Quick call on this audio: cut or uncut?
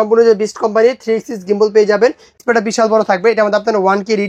cut